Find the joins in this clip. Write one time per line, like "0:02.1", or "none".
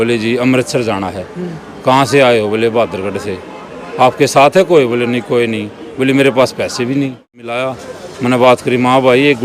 0:07.5